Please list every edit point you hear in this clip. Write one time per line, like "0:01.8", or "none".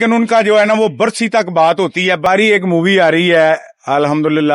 0:02.3